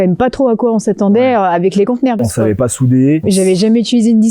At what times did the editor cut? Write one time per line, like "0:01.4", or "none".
0:02.1
0:03.2

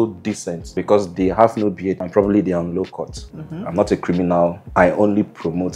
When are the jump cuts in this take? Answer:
0:03.2

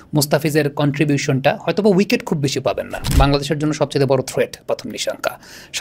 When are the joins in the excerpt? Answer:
0:03.1

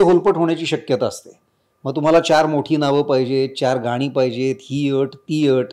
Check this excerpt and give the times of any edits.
none

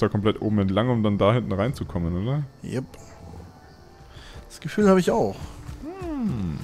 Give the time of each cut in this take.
none

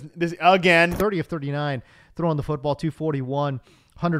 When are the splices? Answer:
0:00.9

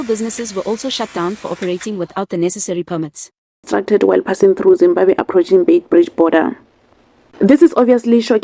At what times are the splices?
0:03.7

